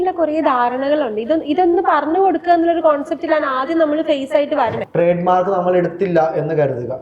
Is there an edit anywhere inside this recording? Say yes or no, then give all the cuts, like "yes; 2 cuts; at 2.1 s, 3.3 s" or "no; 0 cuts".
yes; 1 cut; at 4.8 s